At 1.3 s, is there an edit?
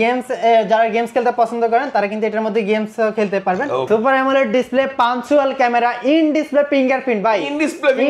no; 1 cut; at 3.9 s

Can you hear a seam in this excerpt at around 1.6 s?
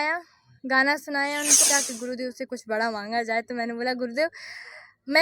yes; 1 cut; at 1.6 s

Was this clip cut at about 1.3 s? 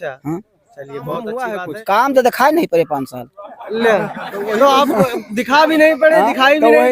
yes; 1 cut; at 1.3 s

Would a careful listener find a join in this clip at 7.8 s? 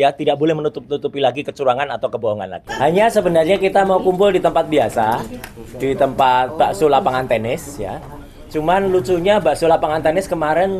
no; 1 cut; at 2.6 s

